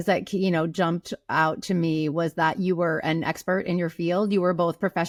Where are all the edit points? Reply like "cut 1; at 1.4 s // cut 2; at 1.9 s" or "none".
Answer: none